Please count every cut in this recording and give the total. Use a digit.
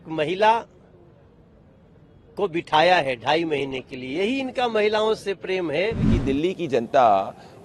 1